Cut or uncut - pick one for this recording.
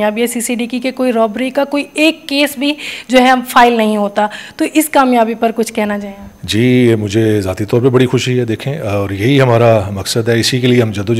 uncut